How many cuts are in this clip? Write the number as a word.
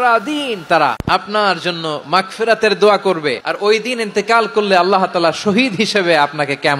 two